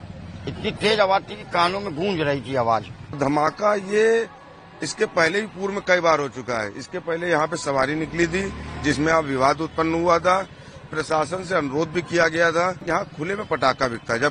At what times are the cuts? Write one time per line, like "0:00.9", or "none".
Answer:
0:03.0
0:12.8